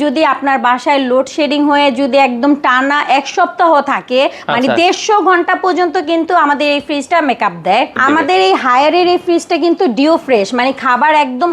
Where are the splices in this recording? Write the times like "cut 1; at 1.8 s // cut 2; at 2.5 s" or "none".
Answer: cut 1; at 8.0 s